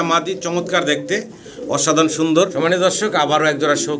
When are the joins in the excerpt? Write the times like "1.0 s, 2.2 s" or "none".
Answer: 2.5 s